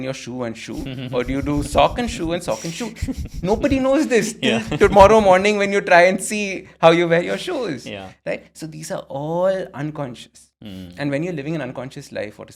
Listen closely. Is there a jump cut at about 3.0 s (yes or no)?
no